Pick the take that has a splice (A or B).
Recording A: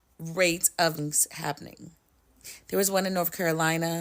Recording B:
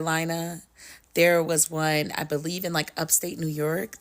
A